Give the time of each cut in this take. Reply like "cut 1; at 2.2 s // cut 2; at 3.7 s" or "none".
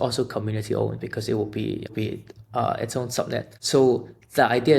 cut 1; at 1.9 s // cut 2; at 3.6 s